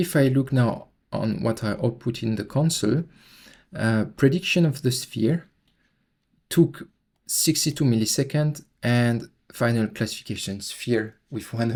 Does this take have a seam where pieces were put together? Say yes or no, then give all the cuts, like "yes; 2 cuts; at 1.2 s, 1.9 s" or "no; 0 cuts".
no; 0 cuts